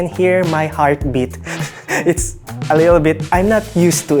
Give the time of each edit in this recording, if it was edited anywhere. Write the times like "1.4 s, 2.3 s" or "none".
3.2 s